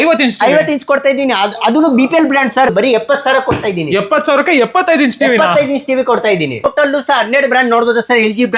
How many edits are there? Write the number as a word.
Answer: two